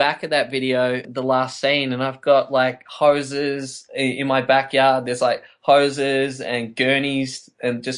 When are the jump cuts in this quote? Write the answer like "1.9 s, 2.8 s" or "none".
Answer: 1.1 s